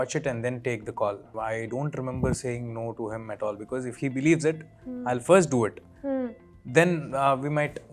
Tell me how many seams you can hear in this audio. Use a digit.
0